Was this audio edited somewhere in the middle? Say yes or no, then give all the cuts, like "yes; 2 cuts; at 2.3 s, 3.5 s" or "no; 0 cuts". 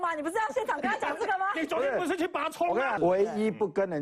yes; 1 cut; at 2.9 s